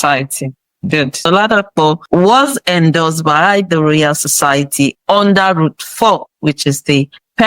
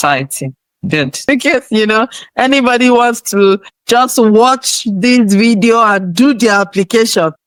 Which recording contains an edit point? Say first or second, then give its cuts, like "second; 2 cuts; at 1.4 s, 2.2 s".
first; 1 cut; at 1.3 s